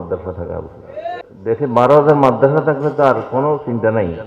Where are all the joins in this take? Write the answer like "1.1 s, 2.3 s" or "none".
1.2 s